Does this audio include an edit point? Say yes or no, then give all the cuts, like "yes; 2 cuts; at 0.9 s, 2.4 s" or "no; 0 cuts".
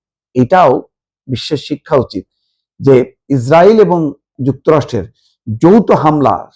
yes; 2 cuts; at 3.2 s, 4.3 s